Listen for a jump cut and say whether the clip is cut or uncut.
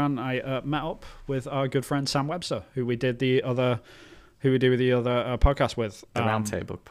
uncut